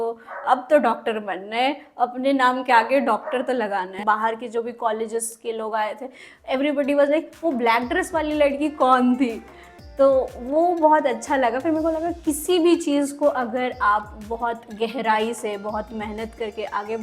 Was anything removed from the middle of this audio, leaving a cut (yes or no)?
yes